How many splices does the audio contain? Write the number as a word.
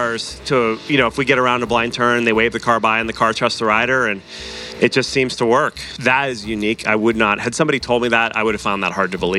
one